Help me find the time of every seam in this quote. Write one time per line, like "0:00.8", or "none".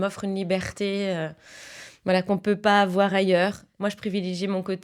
0:03.7